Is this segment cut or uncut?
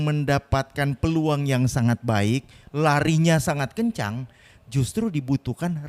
uncut